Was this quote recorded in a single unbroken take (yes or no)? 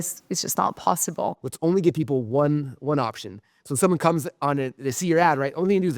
no